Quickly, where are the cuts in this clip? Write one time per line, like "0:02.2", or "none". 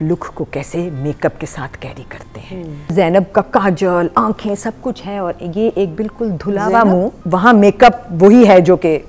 0:03.1
0:07.2